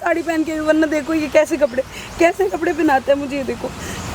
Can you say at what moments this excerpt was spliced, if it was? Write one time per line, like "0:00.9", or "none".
none

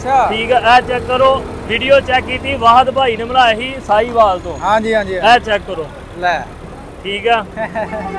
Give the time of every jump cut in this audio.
none

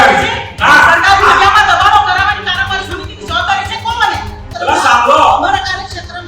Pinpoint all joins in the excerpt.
0:04.5

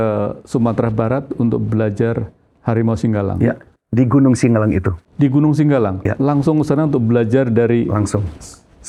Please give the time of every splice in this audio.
none

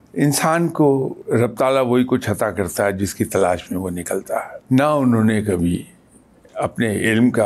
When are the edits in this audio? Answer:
0:01.2
0:04.5

